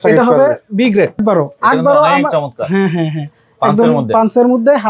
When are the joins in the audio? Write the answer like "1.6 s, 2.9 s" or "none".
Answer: 1.2 s